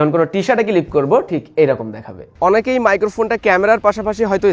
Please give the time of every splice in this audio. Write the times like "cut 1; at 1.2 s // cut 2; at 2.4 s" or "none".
cut 1; at 2.2 s